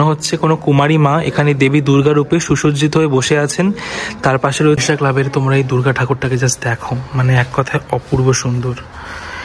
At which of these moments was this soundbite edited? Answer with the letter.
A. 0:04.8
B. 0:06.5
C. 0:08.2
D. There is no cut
A